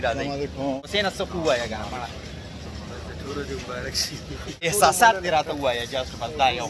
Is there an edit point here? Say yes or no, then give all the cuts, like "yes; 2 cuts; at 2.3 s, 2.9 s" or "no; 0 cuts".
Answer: yes; 2 cuts; at 0.8 s, 4.7 s